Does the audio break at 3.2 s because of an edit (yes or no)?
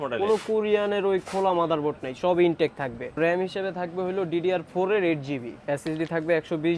yes